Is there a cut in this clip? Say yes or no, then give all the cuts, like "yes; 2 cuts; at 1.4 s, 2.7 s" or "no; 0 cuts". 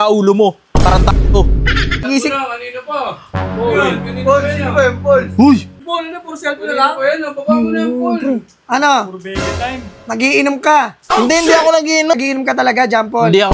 yes; 3 cuts; at 2.0 s, 5.8 s, 12.2 s